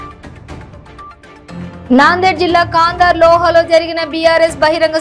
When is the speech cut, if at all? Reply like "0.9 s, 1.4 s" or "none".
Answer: 1.8 s